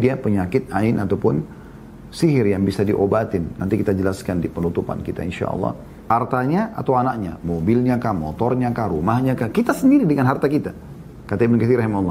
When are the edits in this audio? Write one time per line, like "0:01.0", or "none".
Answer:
0:05.9